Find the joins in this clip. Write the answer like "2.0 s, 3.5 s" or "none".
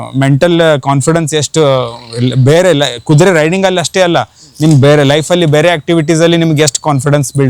none